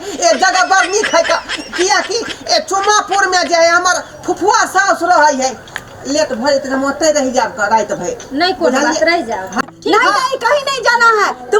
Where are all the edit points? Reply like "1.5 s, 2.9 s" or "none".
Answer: 9.5 s